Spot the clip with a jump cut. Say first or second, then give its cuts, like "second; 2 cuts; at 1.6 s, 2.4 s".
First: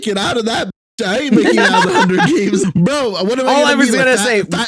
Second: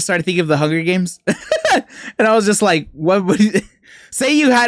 first; 1 cut; at 2.6 s